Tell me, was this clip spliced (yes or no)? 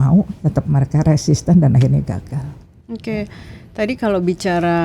no